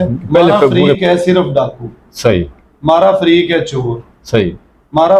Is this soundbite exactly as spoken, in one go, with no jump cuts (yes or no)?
no